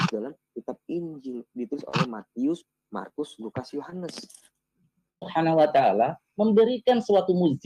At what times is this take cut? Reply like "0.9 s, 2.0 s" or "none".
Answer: 5.3 s